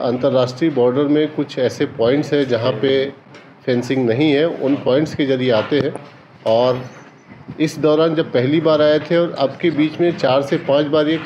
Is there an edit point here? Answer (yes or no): no